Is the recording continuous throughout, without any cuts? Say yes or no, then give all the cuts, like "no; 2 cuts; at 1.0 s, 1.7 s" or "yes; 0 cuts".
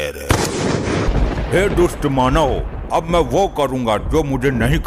no; 1 cut; at 1.1 s